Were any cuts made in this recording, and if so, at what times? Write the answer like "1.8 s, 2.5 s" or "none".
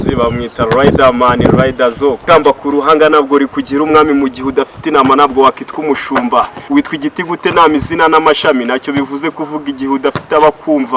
2.2 s, 6.6 s